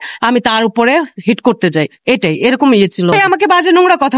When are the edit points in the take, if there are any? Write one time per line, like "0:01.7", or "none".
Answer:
0:03.1